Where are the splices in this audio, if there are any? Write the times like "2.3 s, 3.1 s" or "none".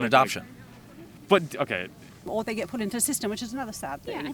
2.2 s